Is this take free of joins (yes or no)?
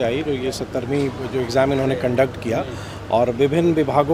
yes